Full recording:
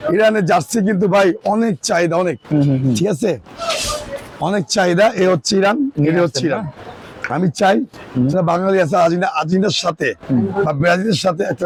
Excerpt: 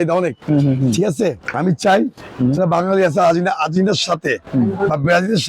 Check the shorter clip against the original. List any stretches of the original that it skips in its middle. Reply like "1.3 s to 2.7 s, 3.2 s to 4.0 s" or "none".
3.5 s to 7.2 s